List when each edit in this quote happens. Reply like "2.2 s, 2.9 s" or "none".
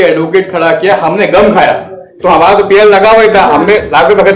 2.2 s